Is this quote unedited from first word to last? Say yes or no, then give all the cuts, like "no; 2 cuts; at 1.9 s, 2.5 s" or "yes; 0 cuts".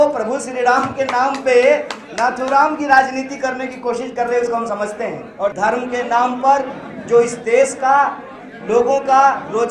no; 1 cut; at 5.5 s